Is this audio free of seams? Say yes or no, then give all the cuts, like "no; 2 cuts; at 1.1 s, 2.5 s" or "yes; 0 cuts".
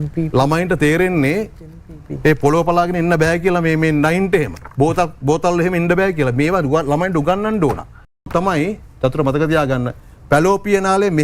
no; 2 cuts; at 4.6 s, 8.3 s